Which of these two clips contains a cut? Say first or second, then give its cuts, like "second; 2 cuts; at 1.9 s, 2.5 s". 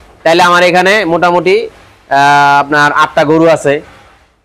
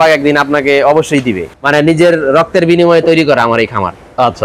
second; 1 cut; at 1.5 s